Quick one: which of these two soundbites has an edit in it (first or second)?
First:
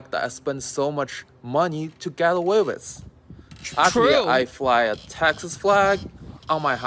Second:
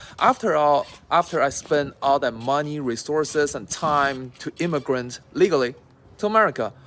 first